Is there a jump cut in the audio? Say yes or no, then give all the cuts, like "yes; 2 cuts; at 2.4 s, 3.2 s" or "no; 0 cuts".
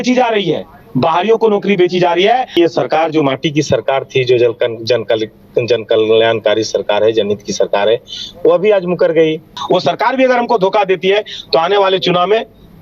yes; 2 cuts; at 2.6 s, 9.5 s